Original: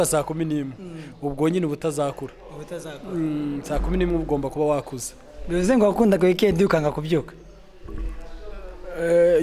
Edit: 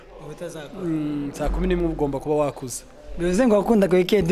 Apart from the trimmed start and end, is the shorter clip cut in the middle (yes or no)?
no